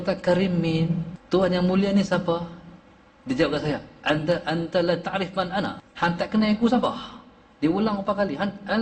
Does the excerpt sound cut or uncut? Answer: cut